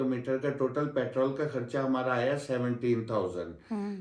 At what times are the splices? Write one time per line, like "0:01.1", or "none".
none